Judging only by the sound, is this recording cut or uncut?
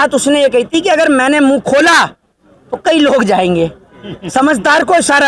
uncut